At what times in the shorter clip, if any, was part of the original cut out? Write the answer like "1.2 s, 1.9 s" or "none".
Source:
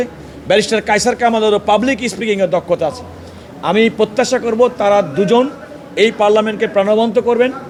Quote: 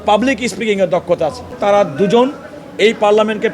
1.6 s